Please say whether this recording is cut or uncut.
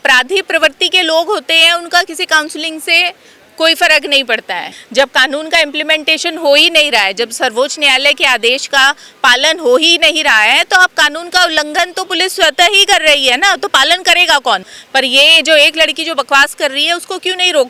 cut